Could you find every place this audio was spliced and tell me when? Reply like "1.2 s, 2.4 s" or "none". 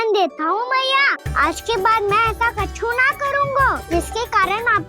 1.2 s, 3.8 s

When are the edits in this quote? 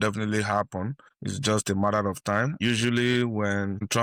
none

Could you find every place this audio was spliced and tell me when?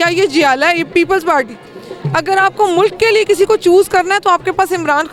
none

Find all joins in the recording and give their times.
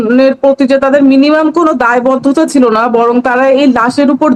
none

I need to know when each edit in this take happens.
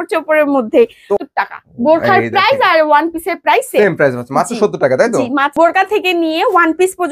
1.2 s, 5.5 s

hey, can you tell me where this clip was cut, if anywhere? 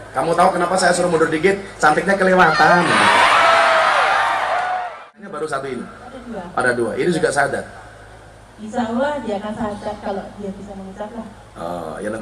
5.0 s

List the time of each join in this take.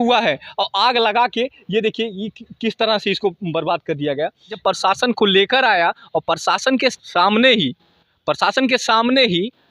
4.6 s, 7.0 s

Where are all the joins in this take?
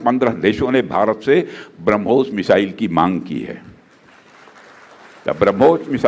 none

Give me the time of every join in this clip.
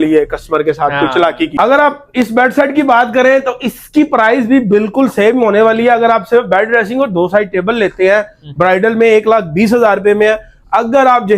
1.5 s

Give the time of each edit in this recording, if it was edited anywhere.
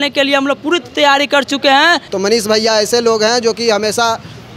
2.1 s

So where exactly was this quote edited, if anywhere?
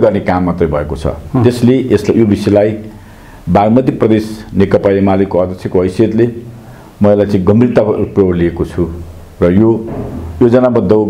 none

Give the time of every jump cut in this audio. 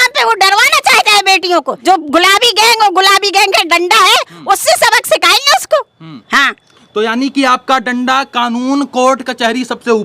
1.7 s

